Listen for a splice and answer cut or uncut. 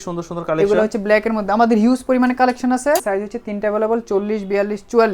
cut